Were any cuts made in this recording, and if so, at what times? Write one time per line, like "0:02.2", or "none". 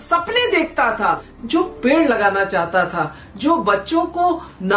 0:01.3